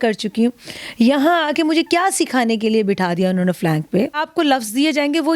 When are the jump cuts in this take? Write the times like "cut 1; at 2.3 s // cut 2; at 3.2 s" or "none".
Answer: cut 1; at 4.2 s